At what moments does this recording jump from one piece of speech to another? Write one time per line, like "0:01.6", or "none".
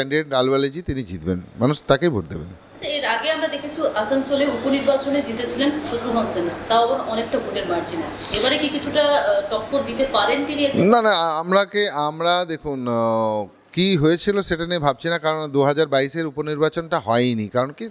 none